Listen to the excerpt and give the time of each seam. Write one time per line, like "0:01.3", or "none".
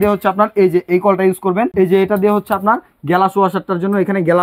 0:01.7

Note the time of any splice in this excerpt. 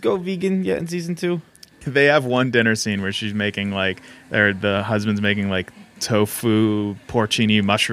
0:01.8

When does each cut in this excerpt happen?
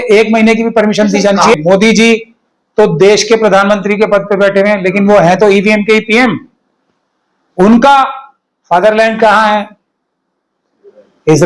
0:01.5

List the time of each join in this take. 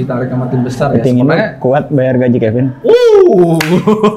none

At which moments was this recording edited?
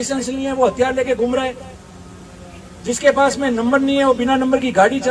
none

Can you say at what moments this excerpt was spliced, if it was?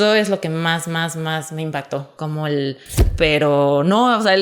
0:03.1

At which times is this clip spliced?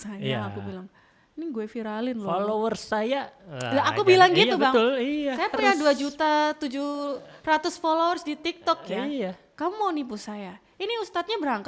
none

